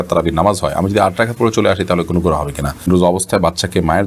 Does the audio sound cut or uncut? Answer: cut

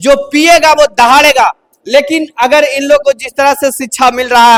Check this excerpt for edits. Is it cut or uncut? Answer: uncut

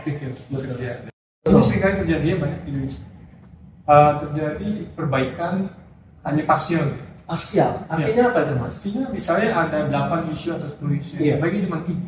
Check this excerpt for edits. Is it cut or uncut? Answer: cut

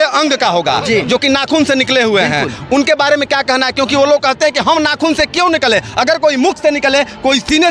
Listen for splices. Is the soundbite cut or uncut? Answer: uncut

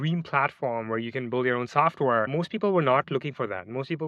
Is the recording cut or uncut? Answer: cut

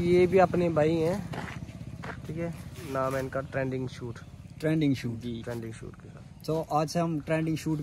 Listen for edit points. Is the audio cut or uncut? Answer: uncut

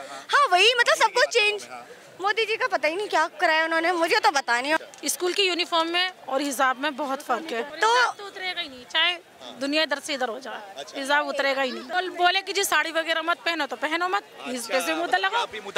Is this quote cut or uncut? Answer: cut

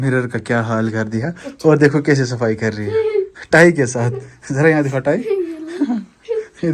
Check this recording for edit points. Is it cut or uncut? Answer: uncut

